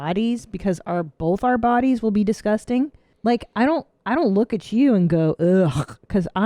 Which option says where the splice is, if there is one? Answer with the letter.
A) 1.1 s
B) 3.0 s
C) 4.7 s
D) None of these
B